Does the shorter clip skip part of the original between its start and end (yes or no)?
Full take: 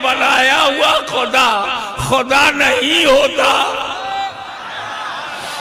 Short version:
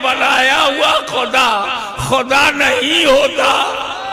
no